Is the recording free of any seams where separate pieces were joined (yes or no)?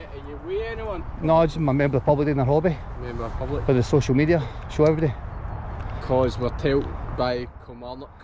yes